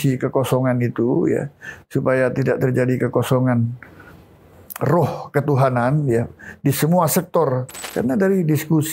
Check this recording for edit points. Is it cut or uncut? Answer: cut